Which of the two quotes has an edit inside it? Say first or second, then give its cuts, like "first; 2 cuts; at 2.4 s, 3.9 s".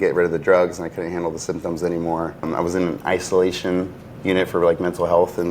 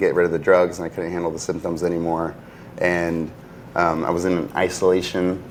first; 1 cut; at 2.5 s